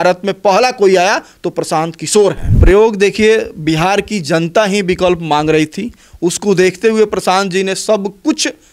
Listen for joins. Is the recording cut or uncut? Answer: cut